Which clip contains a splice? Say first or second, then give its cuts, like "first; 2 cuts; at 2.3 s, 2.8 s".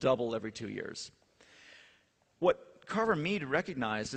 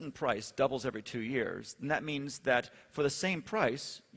second; 1 cut; at 2.8 s